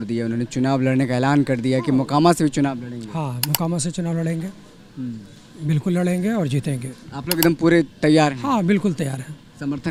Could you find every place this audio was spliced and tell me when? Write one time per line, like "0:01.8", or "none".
none